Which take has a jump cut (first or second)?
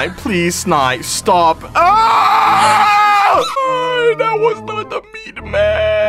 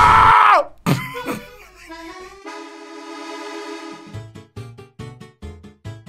first